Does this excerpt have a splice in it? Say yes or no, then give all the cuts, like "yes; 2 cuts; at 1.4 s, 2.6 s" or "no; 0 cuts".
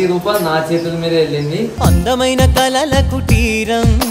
no; 0 cuts